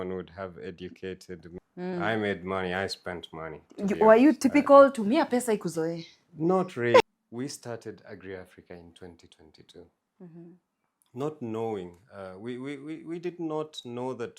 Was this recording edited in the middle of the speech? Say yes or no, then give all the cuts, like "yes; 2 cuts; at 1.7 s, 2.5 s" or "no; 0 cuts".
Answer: yes; 2 cuts; at 1.5 s, 7.0 s